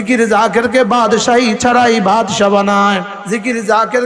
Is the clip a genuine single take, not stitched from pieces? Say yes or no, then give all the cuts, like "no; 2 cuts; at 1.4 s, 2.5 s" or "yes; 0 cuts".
no; 1 cut; at 3.1 s